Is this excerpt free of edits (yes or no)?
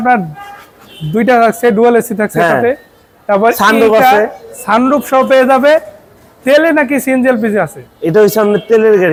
yes